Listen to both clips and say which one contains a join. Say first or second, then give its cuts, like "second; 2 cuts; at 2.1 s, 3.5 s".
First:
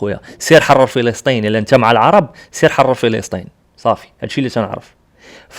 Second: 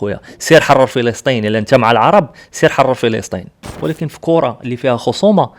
second; 1 cut; at 3.6 s